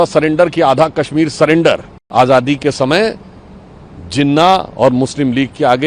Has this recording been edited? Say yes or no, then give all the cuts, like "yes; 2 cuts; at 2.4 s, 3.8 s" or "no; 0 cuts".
yes; 1 cut; at 2.0 s